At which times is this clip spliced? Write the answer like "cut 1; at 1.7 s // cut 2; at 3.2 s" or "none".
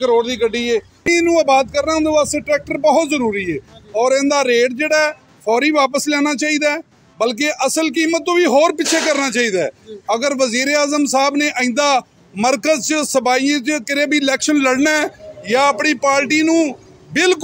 cut 1; at 1.1 s